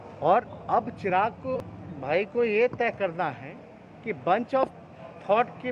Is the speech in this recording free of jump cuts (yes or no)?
no